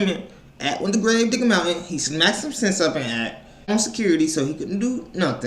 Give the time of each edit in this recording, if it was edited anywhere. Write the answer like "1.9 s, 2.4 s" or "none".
3.7 s